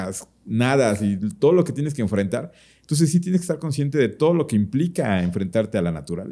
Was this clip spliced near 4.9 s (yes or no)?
no